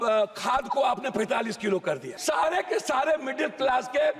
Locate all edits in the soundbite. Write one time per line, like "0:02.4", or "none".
0:02.1

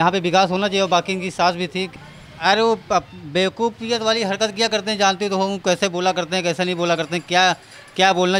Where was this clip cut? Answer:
0:01.9

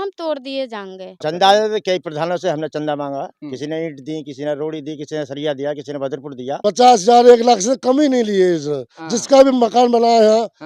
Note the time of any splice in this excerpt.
0:01.0
0:06.4

